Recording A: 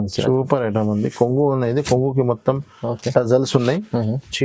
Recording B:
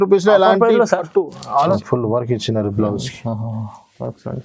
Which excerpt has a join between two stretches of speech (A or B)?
B